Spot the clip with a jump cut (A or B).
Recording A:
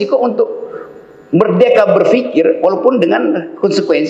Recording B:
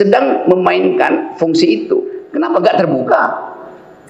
B